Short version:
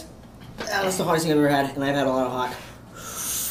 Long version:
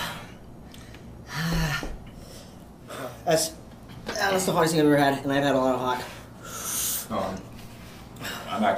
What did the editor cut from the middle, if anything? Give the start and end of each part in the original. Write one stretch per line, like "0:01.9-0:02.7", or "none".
none